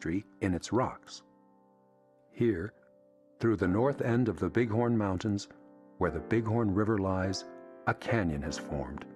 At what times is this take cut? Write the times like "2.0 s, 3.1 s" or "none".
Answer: 3.6 s

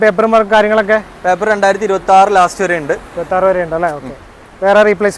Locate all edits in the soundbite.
none

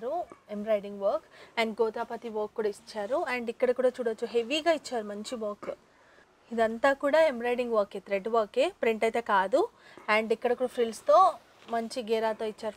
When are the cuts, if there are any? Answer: none

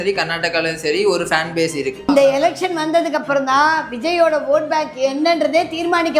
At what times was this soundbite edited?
2.1 s

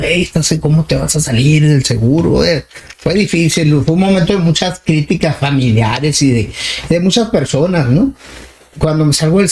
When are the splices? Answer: none

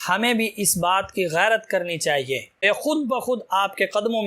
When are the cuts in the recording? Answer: 2.6 s

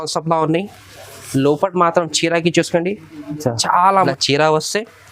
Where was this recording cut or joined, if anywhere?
3.9 s

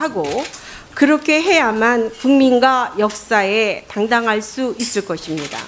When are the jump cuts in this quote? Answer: 1.4 s

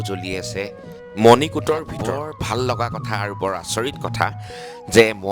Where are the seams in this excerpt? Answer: 2.0 s

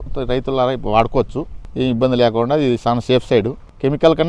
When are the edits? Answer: 1.6 s

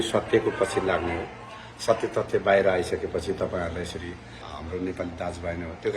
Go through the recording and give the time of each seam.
4.4 s

